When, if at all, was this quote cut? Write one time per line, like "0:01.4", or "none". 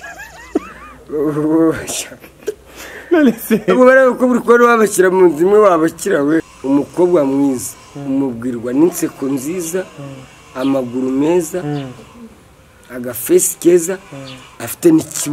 0:06.4